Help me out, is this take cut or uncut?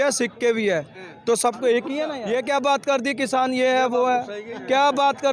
cut